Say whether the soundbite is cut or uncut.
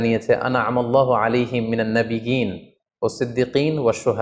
uncut